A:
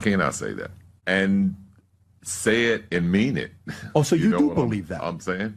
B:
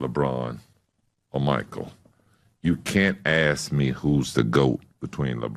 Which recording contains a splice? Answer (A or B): A